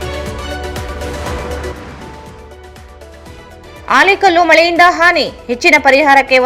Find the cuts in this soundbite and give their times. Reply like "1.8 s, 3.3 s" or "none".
1.3 s